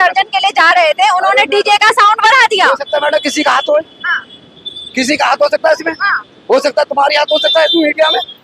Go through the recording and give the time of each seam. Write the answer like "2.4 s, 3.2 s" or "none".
none